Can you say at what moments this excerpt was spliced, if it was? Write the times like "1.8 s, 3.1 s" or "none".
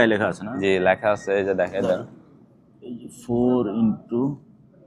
none